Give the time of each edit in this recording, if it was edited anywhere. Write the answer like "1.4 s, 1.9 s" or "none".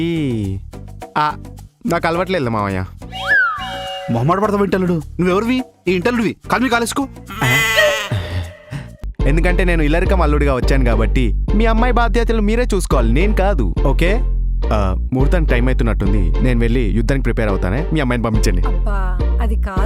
9.1 s